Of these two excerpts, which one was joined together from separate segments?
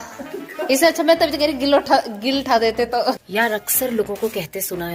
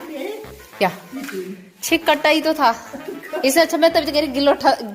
first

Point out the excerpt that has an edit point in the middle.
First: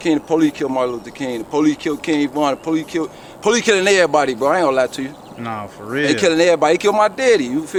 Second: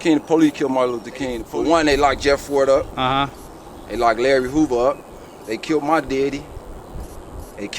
second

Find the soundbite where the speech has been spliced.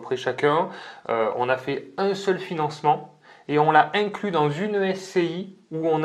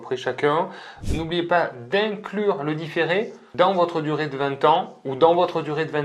second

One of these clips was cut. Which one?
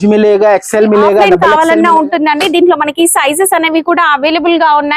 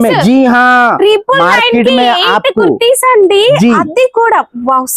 first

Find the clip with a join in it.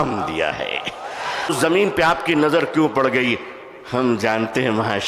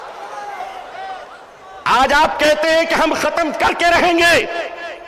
first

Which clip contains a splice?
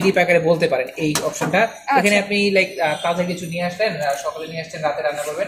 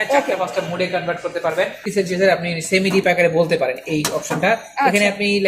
second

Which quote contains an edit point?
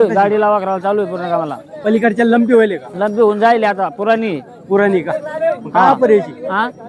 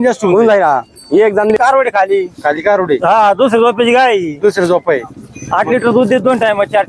second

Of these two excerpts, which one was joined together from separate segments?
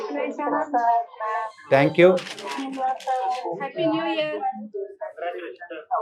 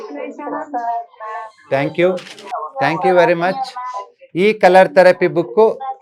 second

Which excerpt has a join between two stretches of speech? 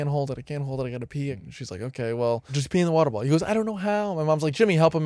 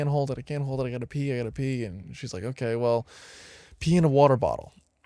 first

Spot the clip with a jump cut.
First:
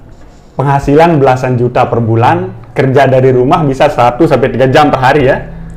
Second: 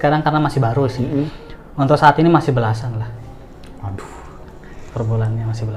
second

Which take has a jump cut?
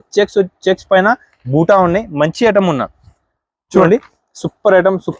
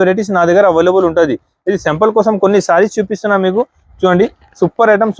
first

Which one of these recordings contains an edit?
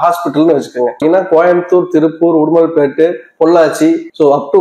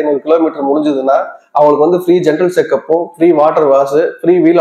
first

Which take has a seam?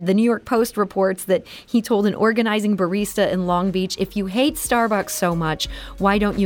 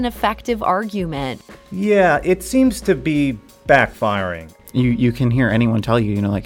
second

